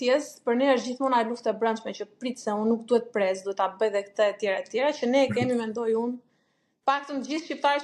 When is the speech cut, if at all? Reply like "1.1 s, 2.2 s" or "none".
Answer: none